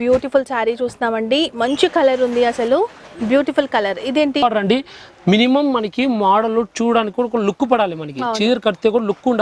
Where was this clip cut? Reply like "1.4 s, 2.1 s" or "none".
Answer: 4.4 s